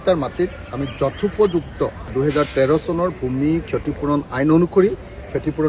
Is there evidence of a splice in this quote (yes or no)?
no